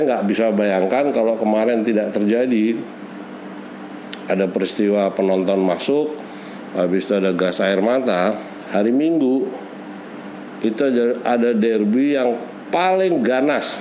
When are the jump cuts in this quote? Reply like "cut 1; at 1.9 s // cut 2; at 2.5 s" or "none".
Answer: none